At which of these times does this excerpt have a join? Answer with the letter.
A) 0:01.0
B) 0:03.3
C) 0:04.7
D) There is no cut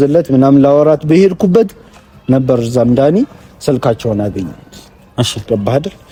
D